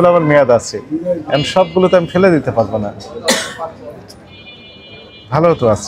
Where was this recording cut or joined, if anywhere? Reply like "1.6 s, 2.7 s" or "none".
none